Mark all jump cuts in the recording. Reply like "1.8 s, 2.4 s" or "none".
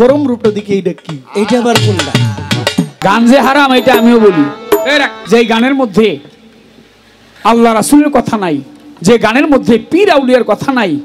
3.0 s, 5.2 s